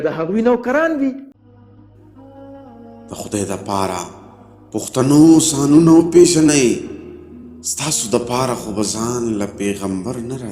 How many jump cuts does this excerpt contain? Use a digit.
1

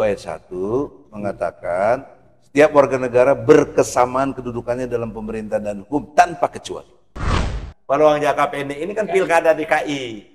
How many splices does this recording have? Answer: 1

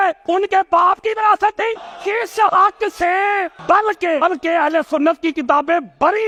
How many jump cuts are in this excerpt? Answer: 0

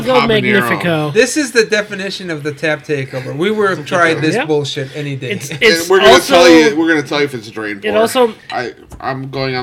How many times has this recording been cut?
1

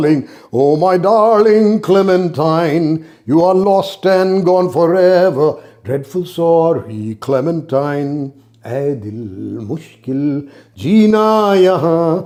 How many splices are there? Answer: 0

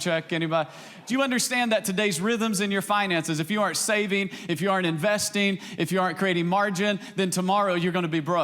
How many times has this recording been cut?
1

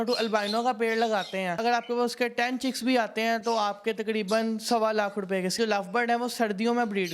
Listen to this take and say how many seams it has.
2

